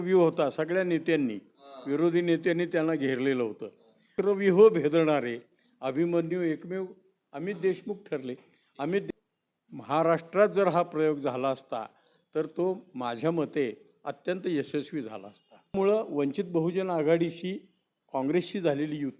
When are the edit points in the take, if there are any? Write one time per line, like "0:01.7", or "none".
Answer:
0:04.1
0:09.0
0:15.7